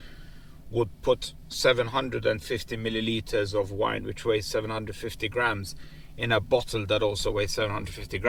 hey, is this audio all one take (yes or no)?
yes